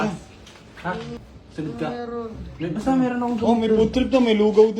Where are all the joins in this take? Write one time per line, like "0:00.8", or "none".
0:01.3